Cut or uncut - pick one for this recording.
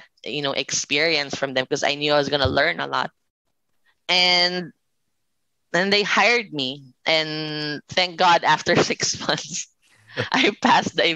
uncut